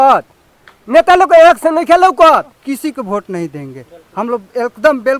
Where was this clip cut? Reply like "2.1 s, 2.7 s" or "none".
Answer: 2.6 s